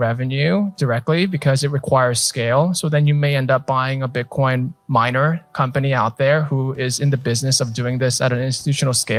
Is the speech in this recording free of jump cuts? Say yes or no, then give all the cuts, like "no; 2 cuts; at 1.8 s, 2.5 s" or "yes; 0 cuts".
yes; 0 cuts